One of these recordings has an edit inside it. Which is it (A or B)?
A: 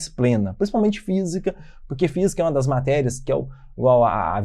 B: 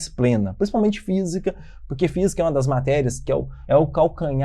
B